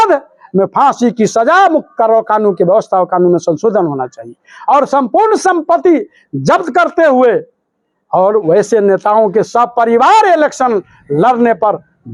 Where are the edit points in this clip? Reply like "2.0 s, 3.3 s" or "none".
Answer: none